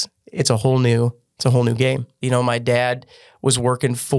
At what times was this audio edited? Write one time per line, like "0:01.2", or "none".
0:02.2